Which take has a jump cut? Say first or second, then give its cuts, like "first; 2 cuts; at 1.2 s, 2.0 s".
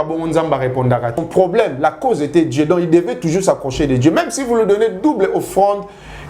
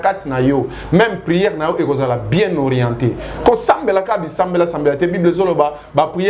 first; 1 cut; at 1.2 s